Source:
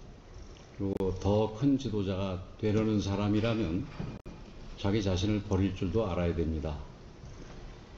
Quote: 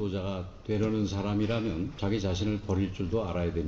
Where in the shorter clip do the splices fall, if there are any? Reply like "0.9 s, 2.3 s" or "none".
1.9 s